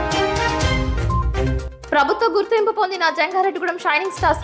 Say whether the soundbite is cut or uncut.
uncut